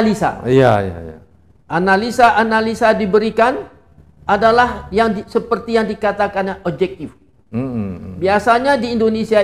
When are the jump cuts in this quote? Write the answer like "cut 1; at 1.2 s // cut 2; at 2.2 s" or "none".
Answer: none